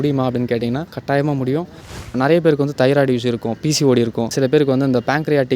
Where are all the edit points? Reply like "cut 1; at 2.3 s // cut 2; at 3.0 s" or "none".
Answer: cut 1; at 0.8 s // cut 2; at 2.1 s // cut 3; at 4.3 s